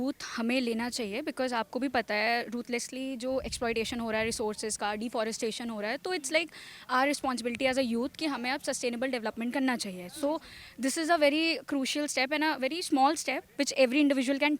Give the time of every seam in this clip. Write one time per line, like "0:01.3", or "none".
none